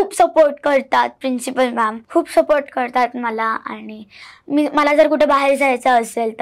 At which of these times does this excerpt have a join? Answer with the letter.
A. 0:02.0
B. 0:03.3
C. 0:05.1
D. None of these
A